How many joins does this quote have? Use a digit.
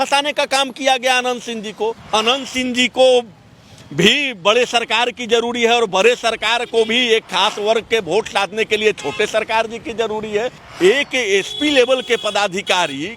2